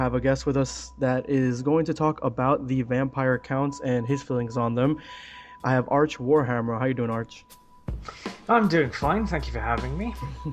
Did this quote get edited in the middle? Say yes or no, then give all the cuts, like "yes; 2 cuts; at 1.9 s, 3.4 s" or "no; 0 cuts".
yes; 1 cut; at 9.2 s